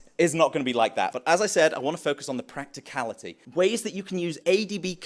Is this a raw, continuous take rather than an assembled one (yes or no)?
no